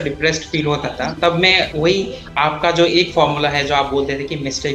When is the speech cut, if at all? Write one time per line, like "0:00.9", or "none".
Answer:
0:01.9